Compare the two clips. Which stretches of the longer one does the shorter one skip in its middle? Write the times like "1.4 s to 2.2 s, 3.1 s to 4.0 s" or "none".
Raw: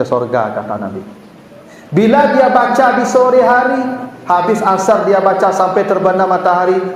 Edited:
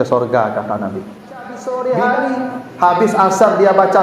1.6 s to 3.1 s